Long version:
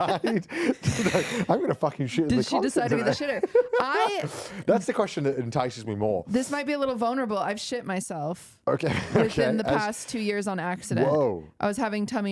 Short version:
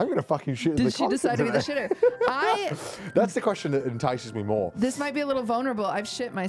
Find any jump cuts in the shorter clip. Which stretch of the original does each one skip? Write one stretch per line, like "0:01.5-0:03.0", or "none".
none